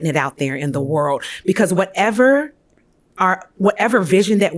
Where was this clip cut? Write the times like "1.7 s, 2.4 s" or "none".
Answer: none